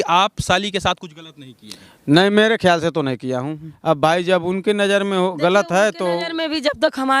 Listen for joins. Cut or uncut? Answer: cut